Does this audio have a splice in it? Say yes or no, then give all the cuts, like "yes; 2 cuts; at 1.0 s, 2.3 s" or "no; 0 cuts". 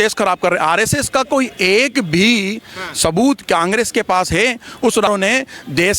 yes; 1 cut; at 5.1 s